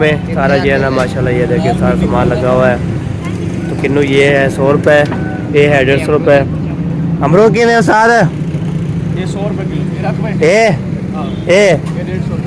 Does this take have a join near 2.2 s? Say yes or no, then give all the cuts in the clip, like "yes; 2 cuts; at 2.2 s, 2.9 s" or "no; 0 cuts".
no; 0 cuts